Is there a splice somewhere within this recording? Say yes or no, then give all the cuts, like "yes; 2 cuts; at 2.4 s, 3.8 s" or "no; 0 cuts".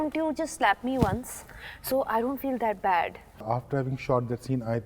yes; 1 cut; at 3.4 s